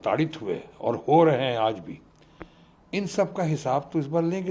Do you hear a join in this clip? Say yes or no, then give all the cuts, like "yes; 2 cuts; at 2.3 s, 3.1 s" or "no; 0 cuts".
no; 0 cuts